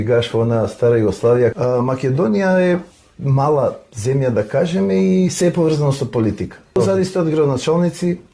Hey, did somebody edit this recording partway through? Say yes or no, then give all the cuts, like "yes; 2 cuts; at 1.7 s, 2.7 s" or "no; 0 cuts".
yes; 2 cuts; at 1.5 s, 6.8 s